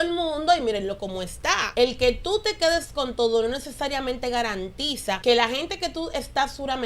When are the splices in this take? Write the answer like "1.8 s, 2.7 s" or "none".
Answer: 1.6 s, 5.2 s